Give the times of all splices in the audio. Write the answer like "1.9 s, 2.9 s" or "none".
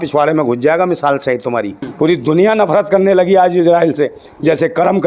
1.8 s